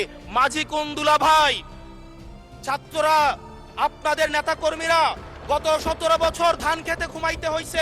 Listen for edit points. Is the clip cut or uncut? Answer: uncut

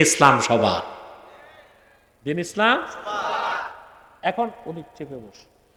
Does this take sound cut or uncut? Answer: uncut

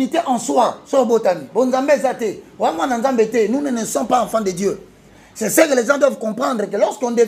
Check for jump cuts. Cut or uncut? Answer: uncut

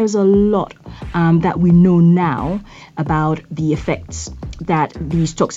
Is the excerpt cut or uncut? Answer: uncut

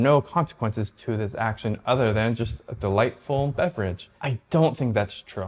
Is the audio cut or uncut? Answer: uncut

